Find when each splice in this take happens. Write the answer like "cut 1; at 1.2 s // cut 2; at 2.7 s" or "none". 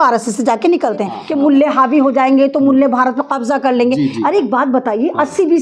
cut 1; at 1.2 s